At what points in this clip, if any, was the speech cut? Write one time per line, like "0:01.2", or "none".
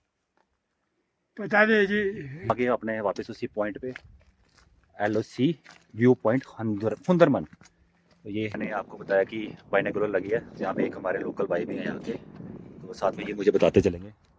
0:02.3
0:08.6